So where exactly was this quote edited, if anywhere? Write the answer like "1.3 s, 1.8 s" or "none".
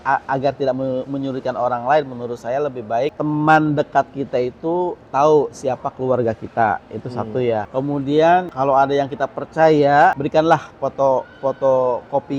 3.2 s, 7.7 s, 8.5 s, 10.2 s